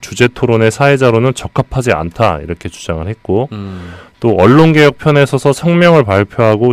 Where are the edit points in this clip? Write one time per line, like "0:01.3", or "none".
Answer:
0:03.7